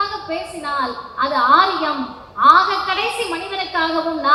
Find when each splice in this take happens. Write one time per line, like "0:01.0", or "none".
none